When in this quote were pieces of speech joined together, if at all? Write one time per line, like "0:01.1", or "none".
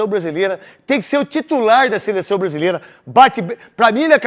none